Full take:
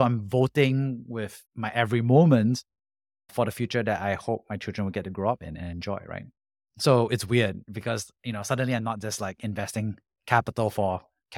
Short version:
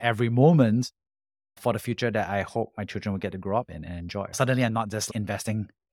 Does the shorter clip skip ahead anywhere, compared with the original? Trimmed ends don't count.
yes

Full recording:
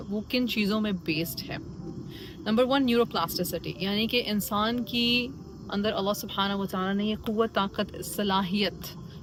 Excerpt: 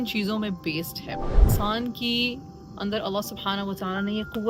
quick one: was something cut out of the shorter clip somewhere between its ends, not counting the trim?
yes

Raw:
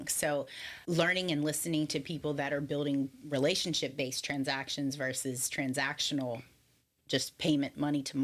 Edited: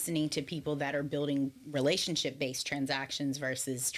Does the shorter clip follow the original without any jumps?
yes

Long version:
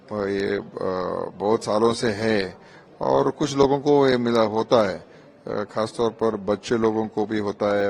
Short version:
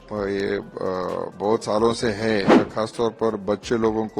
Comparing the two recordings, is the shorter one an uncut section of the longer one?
no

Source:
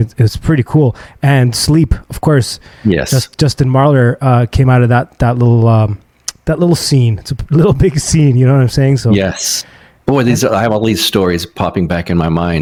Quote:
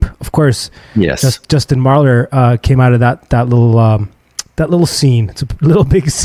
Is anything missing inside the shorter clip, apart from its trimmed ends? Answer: no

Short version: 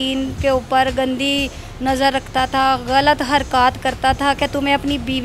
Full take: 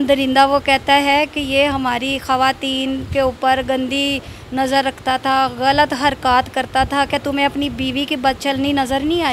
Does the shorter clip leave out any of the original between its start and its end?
no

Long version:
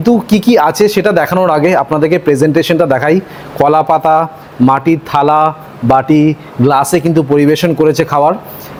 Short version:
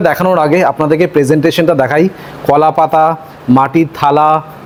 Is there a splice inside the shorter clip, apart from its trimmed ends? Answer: no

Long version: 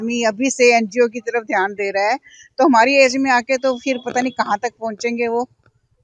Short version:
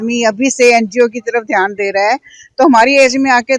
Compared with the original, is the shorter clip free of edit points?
yes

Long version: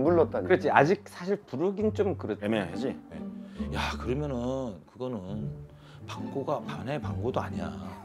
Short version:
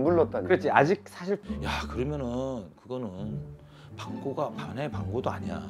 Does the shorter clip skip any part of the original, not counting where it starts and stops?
yes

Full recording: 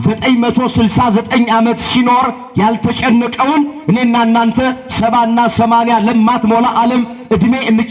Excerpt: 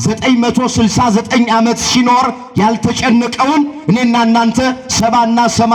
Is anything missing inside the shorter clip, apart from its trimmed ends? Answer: no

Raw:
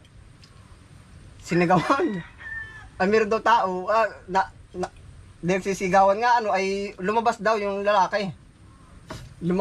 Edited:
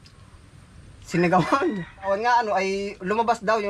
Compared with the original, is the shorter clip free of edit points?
no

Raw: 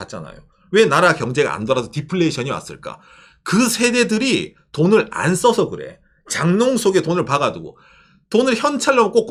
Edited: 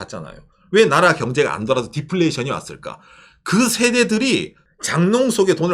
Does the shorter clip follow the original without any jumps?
no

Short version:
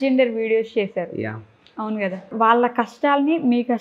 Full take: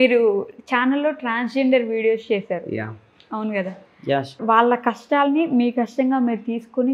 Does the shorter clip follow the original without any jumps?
no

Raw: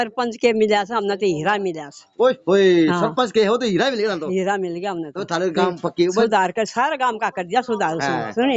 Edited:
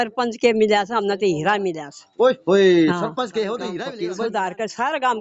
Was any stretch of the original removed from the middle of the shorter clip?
yes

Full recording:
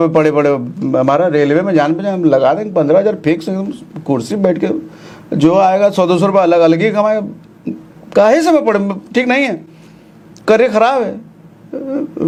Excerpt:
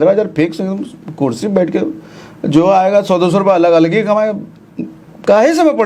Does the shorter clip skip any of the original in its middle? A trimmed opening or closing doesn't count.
no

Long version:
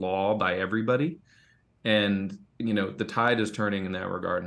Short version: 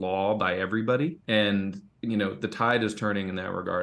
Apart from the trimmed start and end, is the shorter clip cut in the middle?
yes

